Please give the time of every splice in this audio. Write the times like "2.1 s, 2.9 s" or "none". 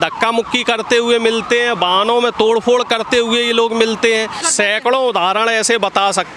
4.4 s